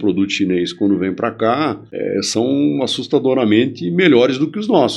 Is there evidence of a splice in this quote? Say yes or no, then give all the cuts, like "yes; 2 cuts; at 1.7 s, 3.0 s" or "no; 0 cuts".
yes; 1 cut; at 1.9 s